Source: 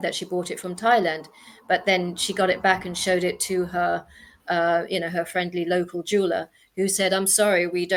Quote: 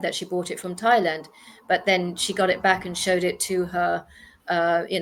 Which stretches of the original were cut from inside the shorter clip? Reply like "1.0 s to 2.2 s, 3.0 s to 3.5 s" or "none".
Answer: none